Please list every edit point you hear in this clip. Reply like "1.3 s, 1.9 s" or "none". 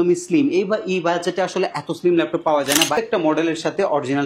2.9 s